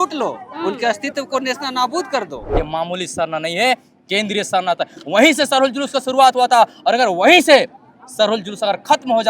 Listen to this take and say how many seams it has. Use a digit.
1